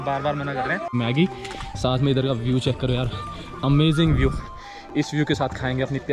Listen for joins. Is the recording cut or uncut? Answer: cut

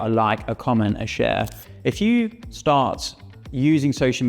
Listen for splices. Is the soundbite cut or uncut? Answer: cut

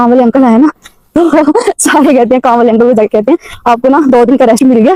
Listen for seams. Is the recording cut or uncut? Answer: uncut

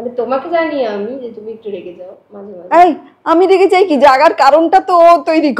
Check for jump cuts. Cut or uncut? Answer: uncut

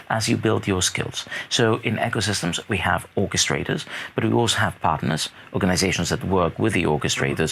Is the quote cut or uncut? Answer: uncut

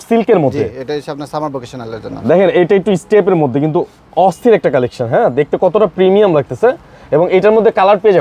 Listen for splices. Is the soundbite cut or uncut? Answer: uncut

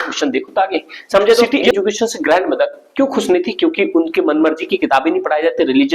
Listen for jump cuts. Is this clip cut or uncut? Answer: cut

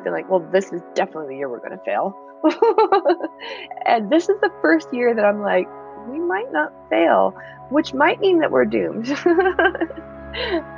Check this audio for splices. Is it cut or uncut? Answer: uncut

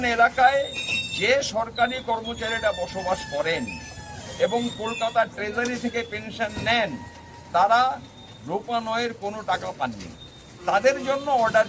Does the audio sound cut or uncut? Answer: uncut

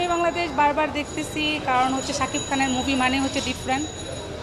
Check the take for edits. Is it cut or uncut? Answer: uncut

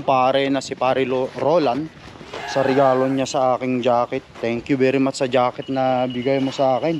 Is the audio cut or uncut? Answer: uncut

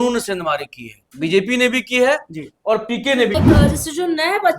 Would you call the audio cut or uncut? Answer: cut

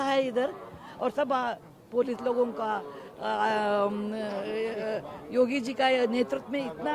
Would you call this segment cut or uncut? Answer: uncut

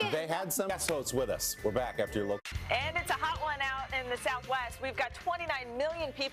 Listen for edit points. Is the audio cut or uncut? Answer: uncut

